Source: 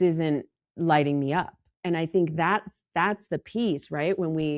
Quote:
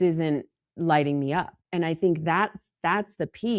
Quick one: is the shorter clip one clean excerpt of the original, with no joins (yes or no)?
no